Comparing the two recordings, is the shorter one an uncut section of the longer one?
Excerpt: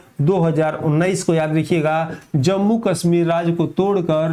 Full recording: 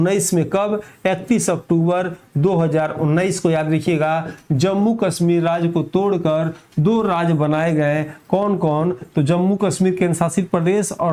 yes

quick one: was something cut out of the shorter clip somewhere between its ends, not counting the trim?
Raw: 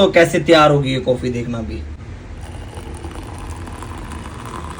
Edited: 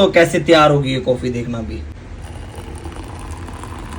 yes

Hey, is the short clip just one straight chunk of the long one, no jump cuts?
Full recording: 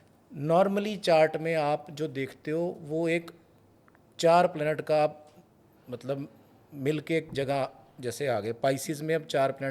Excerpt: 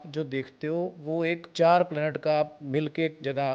no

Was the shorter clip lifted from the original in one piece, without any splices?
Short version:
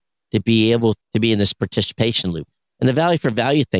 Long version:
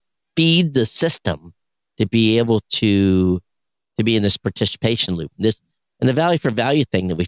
no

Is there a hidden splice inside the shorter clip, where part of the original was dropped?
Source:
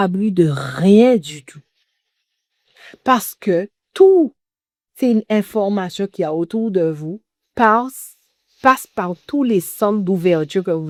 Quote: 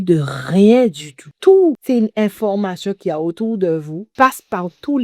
yes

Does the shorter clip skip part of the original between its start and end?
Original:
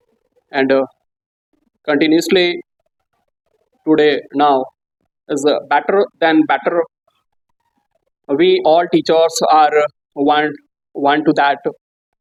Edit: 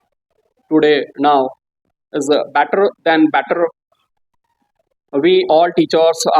no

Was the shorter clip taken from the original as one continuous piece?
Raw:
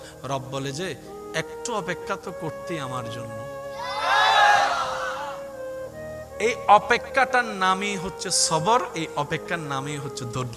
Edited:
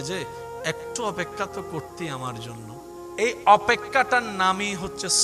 no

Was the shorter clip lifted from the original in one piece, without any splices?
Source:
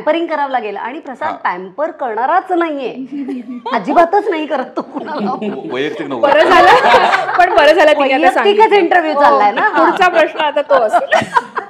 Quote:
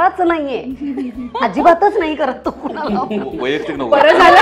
yes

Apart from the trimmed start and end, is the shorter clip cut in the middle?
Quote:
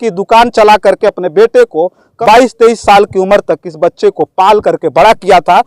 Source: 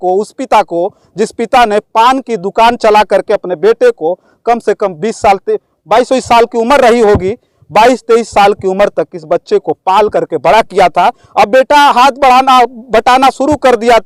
yes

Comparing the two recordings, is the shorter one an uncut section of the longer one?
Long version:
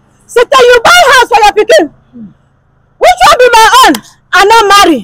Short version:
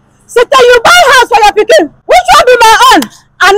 no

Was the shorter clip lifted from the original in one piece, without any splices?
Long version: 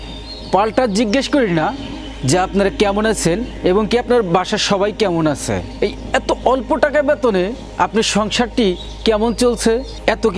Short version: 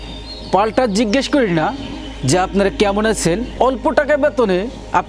no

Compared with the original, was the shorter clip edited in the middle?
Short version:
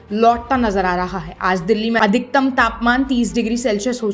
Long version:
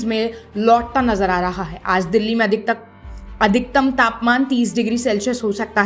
yes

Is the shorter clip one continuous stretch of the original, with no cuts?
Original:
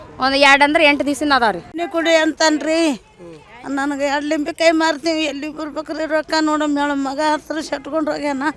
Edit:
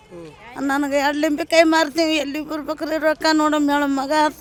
yes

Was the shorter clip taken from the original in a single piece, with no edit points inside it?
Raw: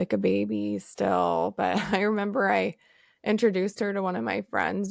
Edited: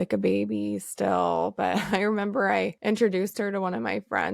no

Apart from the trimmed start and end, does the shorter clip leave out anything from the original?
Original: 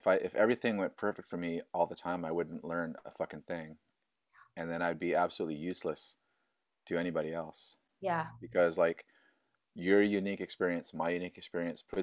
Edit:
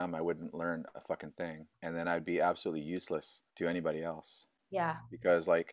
yes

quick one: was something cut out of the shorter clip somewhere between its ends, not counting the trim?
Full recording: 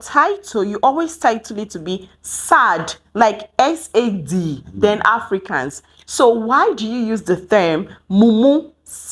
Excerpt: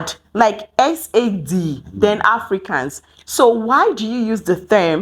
no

